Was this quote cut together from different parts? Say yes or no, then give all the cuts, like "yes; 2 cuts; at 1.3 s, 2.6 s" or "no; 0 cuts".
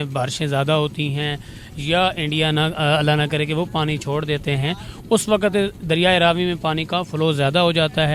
no; 0 cuts